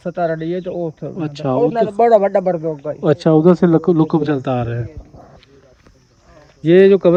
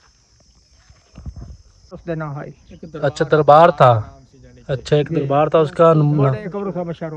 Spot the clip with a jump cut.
second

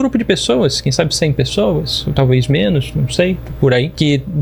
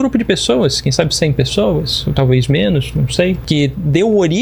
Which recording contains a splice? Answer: second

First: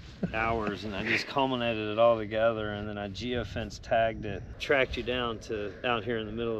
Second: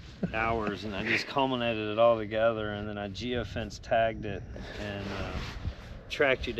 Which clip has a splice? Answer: first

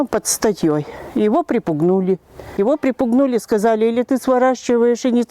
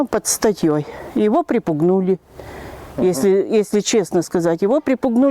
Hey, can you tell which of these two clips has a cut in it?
first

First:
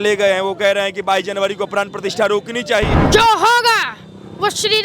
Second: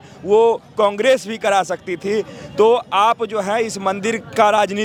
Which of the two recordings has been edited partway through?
first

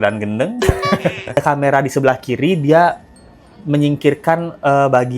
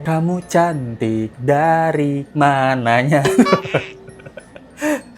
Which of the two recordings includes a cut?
first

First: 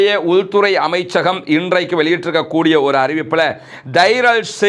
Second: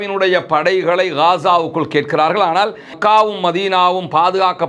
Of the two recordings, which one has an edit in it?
second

